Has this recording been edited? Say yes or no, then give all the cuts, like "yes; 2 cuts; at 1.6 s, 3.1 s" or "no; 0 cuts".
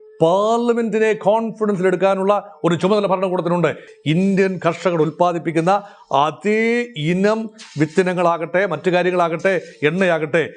yes; 1 cut; at 3.9 s